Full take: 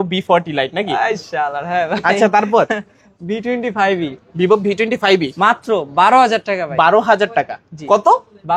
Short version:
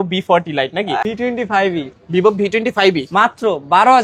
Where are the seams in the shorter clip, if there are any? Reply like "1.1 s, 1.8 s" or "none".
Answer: 1.0 s